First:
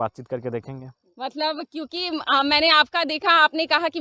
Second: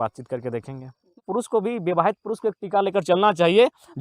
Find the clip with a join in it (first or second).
second